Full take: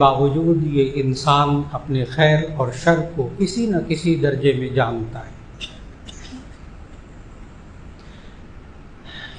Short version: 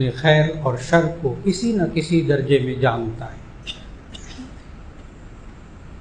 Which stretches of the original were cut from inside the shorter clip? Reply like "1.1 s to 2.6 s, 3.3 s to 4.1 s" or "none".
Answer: none

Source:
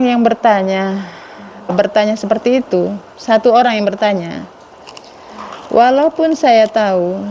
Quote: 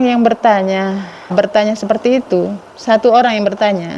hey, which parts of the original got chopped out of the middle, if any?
1.1 s to 1.5 s

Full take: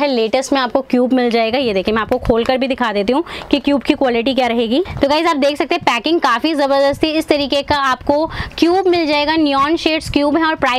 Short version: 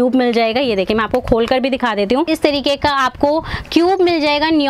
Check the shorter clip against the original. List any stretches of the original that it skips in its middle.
3.2 s to 7.1 s

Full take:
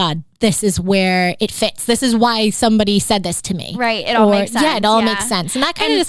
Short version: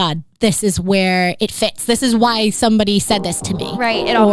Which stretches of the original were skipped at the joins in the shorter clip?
none

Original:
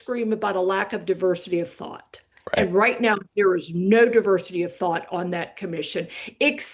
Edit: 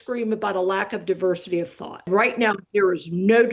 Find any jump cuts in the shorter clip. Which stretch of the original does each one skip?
2.1 s to 2.7 s

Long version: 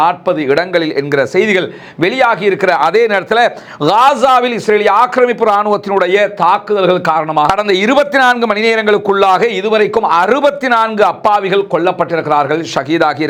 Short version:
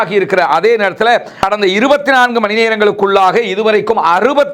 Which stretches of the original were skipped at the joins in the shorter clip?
3.7 s to 7.5 s

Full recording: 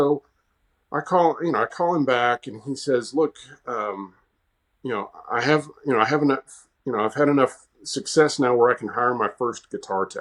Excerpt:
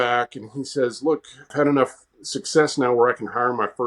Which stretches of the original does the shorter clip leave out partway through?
3.6 s to 7.1 s

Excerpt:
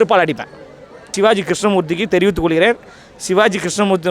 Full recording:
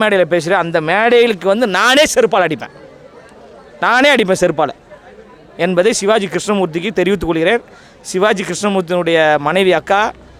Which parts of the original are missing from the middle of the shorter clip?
3.4 s to 6.0 s

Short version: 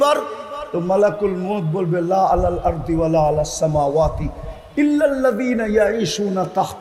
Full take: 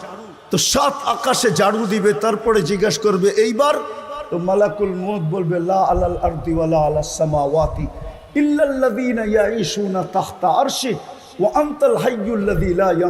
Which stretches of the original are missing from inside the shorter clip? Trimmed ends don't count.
none

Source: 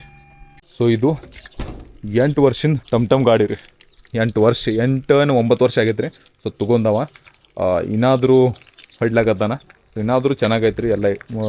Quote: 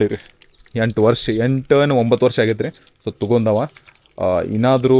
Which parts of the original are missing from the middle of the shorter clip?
none

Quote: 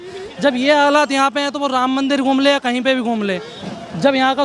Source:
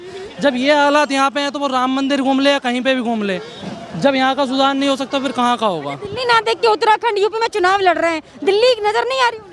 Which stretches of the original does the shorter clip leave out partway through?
none

